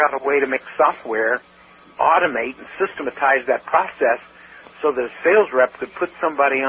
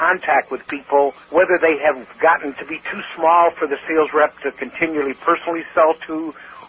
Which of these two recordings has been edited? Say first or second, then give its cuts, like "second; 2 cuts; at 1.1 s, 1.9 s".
second; 2 cuts; at 1.2 s, 2.1 s